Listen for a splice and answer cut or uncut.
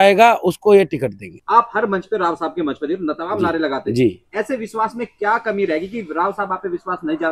cut